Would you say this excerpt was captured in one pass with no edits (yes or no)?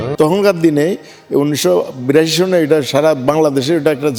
yes